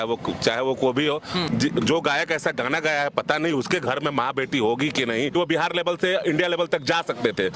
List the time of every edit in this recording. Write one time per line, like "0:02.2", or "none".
0:01.4
0:05.6